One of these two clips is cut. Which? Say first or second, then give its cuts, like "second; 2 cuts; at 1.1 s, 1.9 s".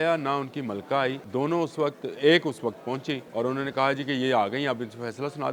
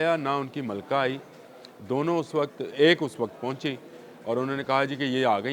first; 2 cuts; at 1.2 s, 3.2 s